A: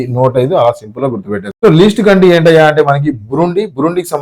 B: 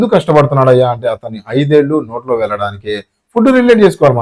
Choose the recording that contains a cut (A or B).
A